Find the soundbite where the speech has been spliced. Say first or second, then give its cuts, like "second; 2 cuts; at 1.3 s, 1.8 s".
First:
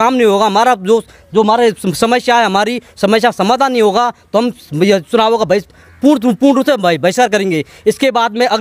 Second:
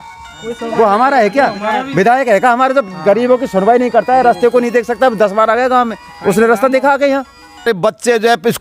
second; 1 cut; at 7.7 s